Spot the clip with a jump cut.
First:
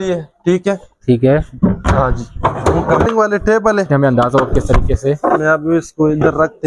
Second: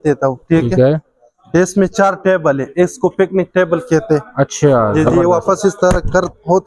first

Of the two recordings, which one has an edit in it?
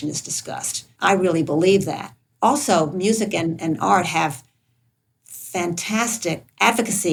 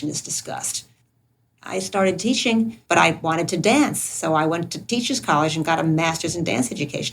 second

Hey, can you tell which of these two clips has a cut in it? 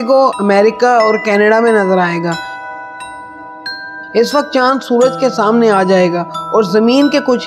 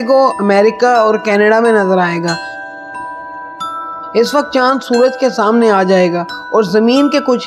second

